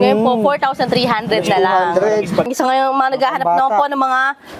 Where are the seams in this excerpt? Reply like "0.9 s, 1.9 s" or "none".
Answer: 2.5 s